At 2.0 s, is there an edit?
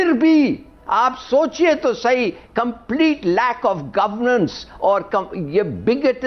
no; 0 cuts

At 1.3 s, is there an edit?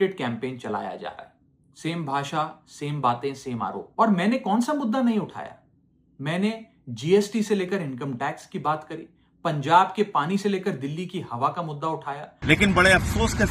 no; 2 cuts; at 3.8 s, 12.3 s

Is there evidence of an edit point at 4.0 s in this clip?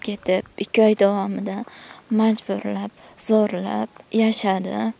yes; 1 cut; at 4.0 s

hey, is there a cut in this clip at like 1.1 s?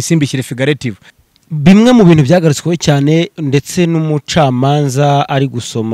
yes; 1 cut; at 1.1 s

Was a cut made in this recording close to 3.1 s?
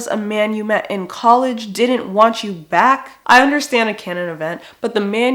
yes; 1 cut; at 3.1 s

